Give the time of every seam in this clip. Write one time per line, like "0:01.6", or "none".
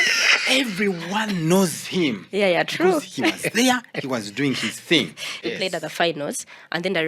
0:05.5

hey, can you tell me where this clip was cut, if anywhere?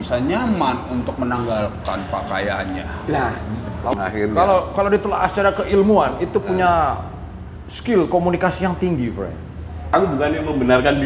0:03.9
0:09.9

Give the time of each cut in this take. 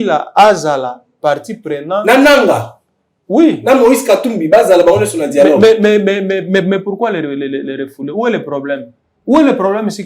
none

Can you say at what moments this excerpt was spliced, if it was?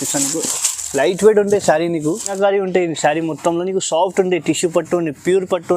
0:02.3

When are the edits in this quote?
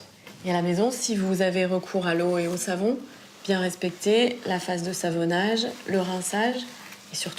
none

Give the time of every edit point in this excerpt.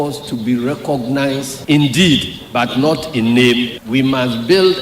0:03.8

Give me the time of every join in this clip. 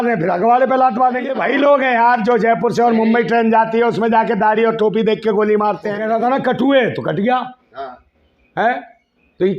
0:01.3
0:06.0

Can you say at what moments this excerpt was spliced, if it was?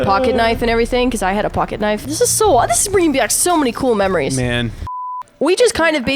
0:02.1
0:05.1

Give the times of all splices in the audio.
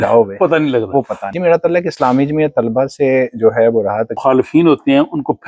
0:01.2
0:04.2

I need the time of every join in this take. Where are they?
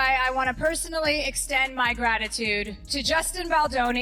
0:02.8

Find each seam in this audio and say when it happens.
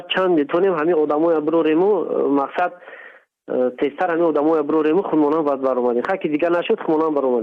none

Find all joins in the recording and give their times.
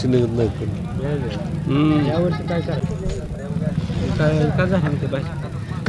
0:02.8

